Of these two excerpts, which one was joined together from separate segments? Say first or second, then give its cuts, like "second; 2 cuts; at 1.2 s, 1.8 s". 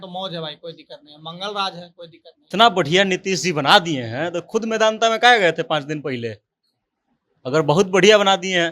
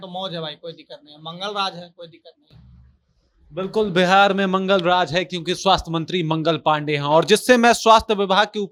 first; 1 cut; at 2.4 s